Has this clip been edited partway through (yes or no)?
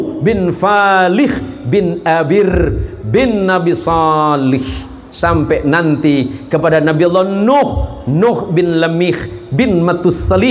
no